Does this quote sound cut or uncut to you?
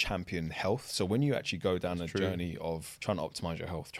cut